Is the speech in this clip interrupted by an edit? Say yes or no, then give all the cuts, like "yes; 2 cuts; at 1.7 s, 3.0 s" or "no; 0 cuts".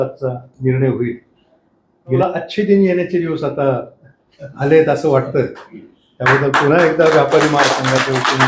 yes; 1 cut; at 2.2 s